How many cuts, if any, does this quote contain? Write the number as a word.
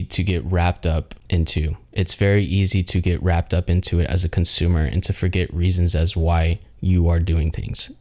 one